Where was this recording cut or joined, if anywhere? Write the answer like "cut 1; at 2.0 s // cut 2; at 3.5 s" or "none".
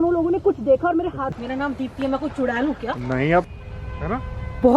cut 1; at 1.3 s // cut 2; at 3.5 s